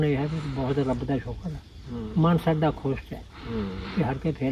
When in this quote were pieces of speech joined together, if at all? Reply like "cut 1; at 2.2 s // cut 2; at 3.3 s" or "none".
none